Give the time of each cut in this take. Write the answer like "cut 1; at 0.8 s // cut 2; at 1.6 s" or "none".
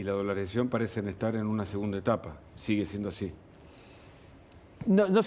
none